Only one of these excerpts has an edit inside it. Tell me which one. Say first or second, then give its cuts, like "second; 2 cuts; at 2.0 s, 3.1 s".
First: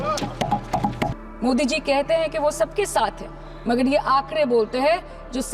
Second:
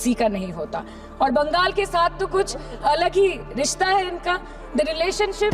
first; 1 cut; at 1.2 s